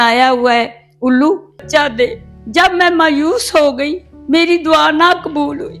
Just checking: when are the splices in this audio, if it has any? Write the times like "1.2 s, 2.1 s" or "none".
1.7 s